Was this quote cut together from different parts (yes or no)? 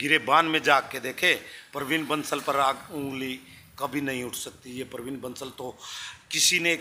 no